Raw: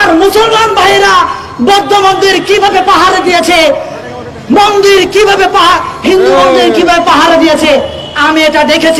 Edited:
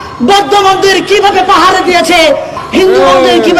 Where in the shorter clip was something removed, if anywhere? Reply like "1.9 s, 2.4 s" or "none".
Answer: 2.6 s